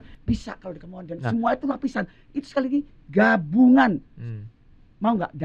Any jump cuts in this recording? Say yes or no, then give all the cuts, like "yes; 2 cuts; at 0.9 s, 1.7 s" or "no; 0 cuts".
no; 0 cuts